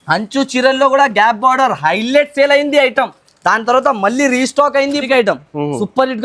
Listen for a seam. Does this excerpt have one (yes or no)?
yes